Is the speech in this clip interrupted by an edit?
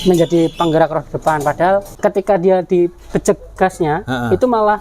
yes; 1 cut; at 1.9 s

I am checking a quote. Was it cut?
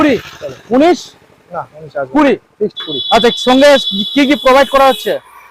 no; 0 cuts

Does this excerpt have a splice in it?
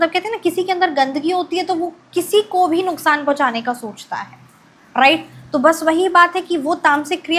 no; 0 cuts

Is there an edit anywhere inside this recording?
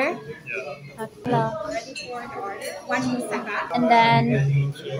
yes; 2 cuts; at 1.3 s, 3.7 s

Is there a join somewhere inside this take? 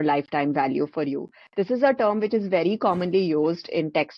no; 0 cuts

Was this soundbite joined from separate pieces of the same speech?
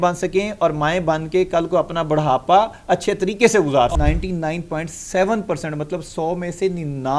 yes; 1 cut; at 3.9 s

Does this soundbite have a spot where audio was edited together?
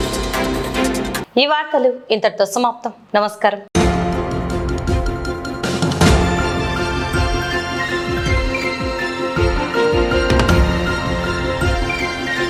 no; 0 cuts

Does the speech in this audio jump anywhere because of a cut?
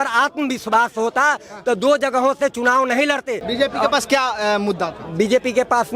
yes; 1 cut; at 3.4 s

